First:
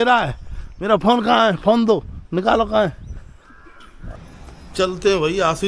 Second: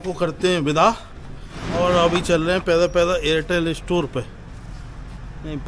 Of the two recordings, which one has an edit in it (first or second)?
first